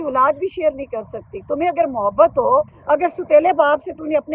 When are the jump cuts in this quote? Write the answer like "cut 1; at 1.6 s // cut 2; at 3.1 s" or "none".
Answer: cut 1; at 2.8 s